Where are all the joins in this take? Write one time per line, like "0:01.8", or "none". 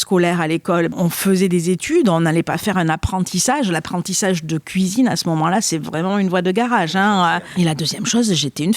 0:00.9
0:07.4

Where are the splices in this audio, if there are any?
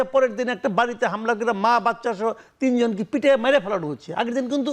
none

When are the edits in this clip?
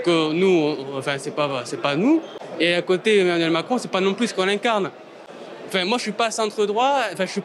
0:05.3

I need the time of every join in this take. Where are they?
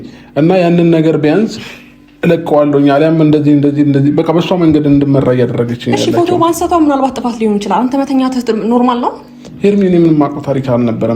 none

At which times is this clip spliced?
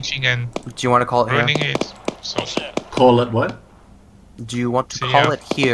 none

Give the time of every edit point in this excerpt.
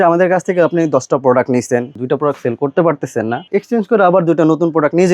0:01.9
0:03.5

